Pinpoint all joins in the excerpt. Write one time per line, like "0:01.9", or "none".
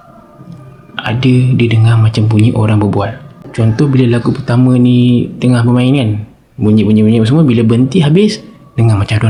none